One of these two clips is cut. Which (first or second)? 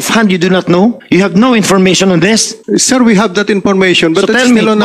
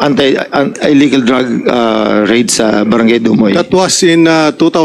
first